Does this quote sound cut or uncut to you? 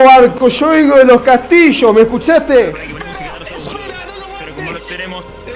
cut